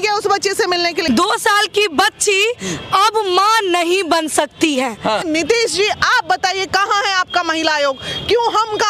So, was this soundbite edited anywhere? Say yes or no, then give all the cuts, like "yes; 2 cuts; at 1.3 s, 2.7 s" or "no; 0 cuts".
yes; 2 cuts; at 1.0 s, 5.2 s